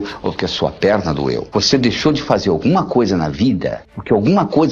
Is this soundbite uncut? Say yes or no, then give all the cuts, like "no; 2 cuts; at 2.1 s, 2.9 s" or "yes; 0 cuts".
no; 1 cut; at 1.4 s